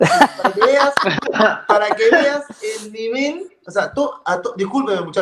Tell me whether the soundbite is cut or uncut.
uncut